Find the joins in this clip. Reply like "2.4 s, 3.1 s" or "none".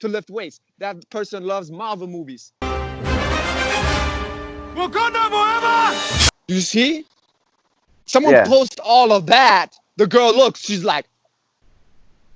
none

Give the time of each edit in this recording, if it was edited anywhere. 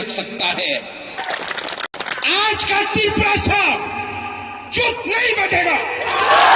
1.2 s

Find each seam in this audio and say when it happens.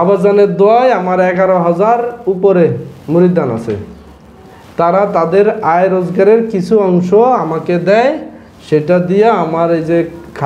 none

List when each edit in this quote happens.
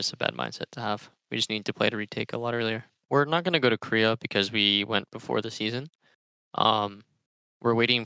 3.0 s

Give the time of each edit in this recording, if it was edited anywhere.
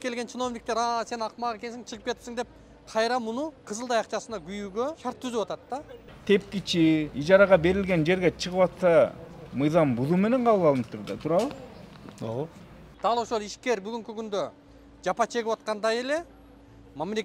3.6 s, 5.0 s, 6.1 s, 7.1 s, 12.9 s

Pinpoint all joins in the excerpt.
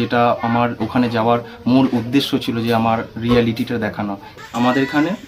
4.3 s

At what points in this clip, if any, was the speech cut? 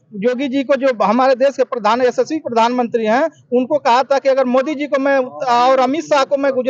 none

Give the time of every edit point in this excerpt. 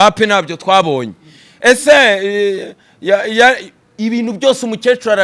none

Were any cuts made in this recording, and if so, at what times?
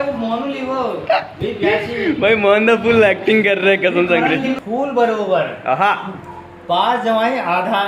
4.6 s

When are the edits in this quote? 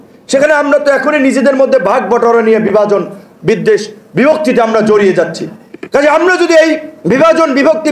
none

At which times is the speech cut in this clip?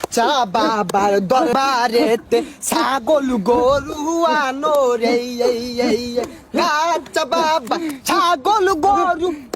1.5 s

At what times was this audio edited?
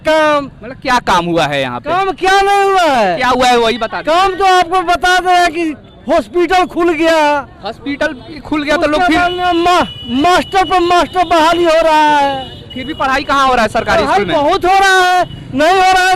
none

